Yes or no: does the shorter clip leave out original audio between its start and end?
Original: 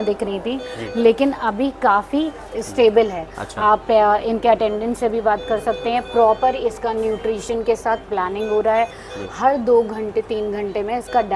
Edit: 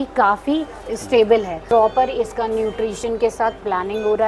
yes